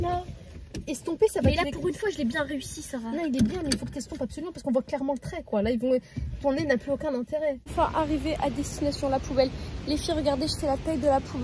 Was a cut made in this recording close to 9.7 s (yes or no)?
no